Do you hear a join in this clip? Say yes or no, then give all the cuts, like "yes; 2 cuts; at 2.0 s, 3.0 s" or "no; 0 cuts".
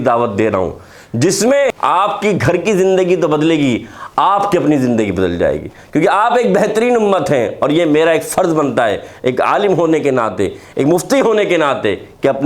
yes; 1 cut; at 1.7 s